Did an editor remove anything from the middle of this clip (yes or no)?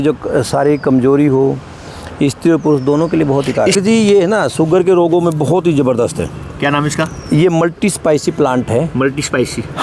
yes